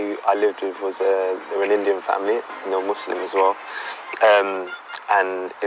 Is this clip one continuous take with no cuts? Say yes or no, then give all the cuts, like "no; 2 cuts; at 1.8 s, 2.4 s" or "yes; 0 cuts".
yes; 0 cuts